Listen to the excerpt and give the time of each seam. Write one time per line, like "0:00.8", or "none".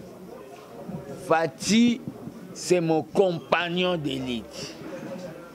none